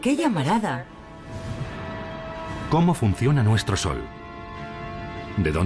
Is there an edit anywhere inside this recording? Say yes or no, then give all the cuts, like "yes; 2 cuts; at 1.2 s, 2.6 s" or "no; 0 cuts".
no; 0 cuts